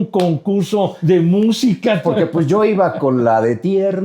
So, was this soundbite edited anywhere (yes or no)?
yes